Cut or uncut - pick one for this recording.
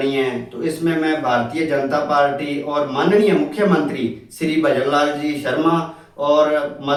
uncut